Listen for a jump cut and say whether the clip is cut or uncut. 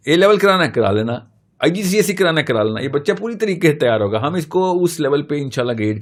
uncut